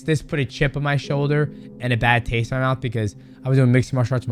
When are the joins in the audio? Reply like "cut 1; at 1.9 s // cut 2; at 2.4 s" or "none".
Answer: none